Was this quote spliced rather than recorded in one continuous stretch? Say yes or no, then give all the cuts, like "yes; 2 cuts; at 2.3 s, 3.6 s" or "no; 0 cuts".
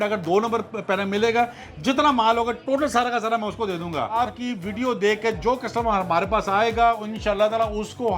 yes; 1 cut; at 4.2 s